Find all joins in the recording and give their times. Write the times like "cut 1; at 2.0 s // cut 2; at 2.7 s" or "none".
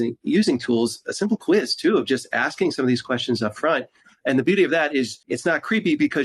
cut 1; at 5.2 s